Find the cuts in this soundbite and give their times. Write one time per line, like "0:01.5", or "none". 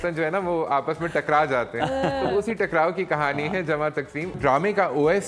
0:04.4